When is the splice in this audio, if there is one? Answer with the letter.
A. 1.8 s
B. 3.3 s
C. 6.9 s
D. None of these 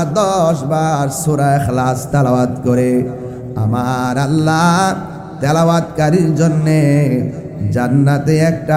D